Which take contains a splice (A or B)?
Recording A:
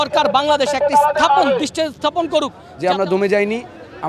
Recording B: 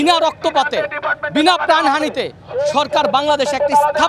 A